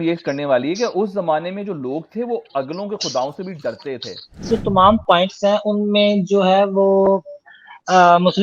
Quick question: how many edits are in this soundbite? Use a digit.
1